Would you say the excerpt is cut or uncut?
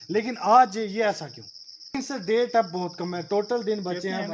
cut